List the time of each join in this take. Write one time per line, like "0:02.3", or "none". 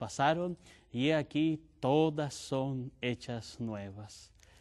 none